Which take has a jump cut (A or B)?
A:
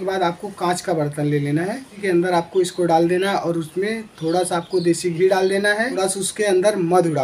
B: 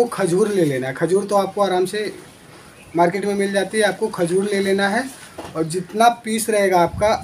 A